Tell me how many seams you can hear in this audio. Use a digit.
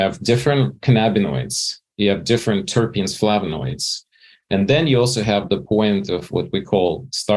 1